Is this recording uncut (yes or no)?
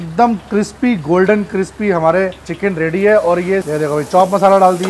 no